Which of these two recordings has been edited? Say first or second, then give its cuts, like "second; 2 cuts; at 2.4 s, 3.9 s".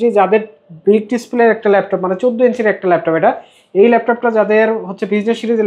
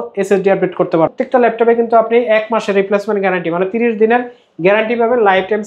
second; 1 cut; at 1.1 s